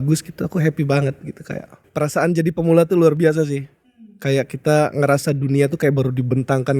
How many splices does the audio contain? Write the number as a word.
one